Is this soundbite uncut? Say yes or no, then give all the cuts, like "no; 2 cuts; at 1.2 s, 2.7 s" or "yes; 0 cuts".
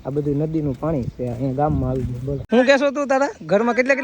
no; 1 cut; at 2.4 s